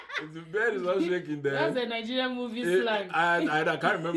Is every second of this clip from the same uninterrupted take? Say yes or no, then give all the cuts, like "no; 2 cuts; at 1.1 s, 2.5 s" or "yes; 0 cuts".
yes; 0 cuts